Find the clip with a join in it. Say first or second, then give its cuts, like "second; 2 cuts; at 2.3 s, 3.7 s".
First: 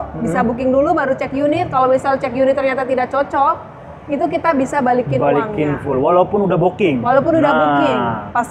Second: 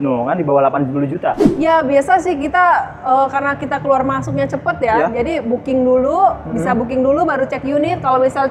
second; 1 cut; at 1.5 s